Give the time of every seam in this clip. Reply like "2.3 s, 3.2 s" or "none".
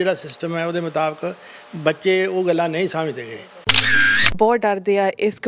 3.9 s